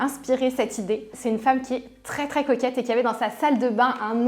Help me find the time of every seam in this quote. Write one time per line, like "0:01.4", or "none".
0:01.1